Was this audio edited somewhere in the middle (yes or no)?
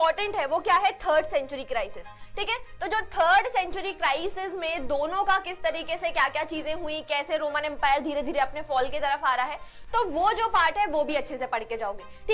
no